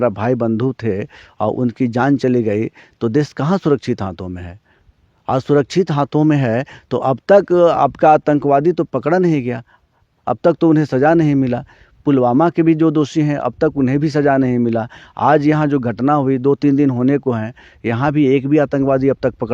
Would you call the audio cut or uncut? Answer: uncut